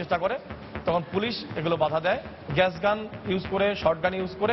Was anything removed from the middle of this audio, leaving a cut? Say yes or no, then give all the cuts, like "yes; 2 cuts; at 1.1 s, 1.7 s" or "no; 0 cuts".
yes; 1 cut; at 2.4 s